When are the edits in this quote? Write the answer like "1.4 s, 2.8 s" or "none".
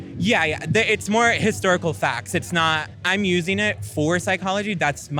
2.9 s